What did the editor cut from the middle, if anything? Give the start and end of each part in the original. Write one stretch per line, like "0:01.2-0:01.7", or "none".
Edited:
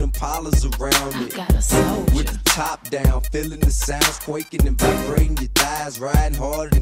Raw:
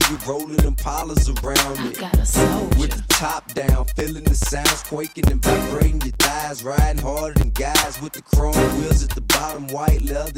none